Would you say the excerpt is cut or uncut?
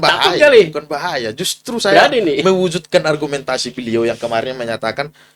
uncut